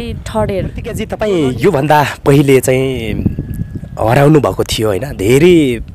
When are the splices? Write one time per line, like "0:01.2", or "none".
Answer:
0:01.1